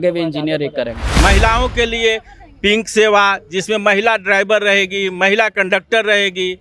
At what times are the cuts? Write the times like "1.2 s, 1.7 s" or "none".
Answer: 1.0 s